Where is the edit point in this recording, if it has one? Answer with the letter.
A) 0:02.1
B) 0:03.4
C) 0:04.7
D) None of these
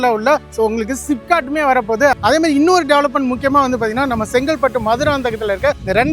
A